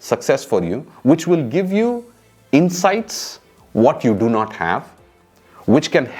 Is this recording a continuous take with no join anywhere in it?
yes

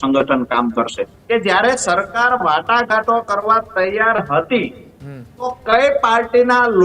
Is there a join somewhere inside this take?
yes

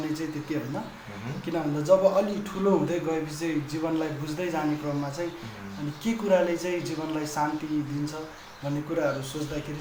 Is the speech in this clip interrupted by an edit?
no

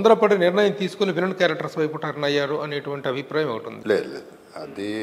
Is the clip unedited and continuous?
no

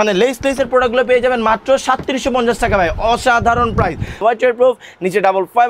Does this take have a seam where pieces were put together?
yes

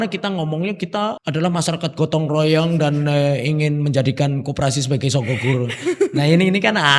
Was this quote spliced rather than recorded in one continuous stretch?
yes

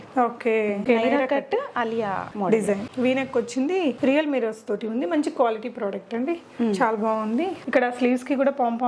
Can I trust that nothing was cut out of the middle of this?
no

